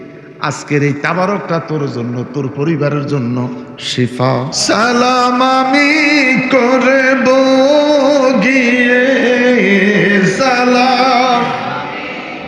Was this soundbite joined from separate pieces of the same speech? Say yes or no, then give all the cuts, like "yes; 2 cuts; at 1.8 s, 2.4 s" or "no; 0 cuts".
yes; 1 cut; at 4.5 s